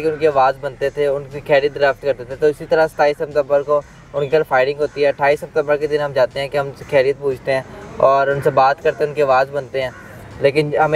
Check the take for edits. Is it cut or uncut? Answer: uncut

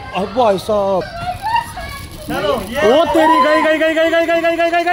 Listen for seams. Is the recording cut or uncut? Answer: cut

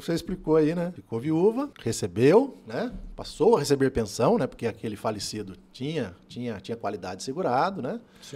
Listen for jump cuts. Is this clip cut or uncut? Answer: cut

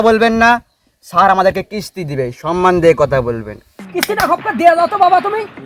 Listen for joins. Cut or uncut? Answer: cut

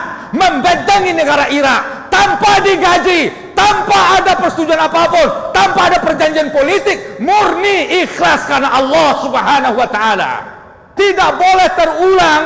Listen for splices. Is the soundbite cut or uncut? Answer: cut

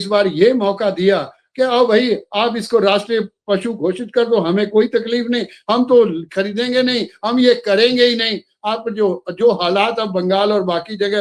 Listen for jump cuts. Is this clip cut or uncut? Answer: uncut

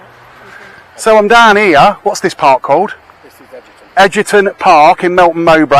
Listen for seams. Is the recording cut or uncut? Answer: uncut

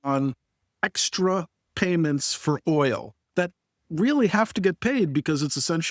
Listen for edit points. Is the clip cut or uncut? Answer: uncut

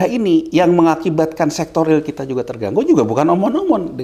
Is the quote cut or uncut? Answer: uncut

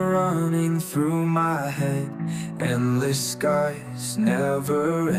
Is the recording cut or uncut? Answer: uncut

